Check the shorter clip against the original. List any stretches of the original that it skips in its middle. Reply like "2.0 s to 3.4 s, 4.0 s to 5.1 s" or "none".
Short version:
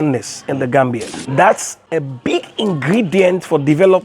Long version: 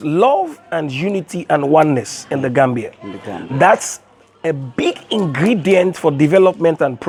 3.0 s to 3.4 s, 4.0 s to 4.3 s